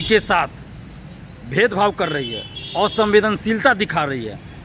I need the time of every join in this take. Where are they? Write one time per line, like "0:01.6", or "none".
none